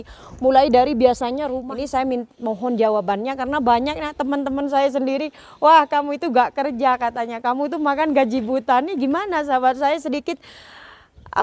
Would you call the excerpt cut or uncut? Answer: cut